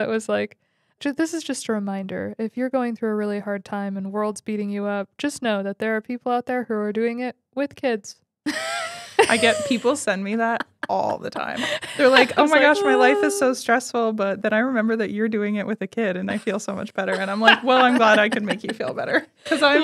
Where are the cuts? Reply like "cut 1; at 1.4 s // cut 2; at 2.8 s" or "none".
cut 1; at 1.0 s